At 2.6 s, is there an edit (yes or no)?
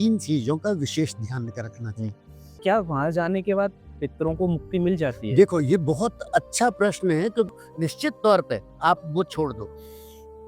yes